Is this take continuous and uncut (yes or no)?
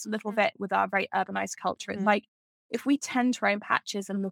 yes